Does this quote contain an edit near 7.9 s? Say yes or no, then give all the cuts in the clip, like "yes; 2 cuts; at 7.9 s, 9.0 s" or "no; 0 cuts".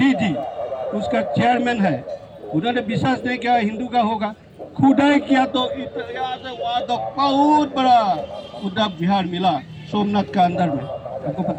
no; 0 cuts